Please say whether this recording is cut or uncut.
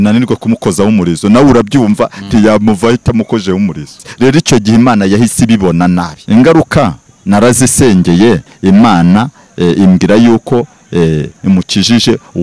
cut